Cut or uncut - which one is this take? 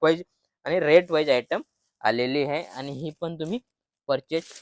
uncut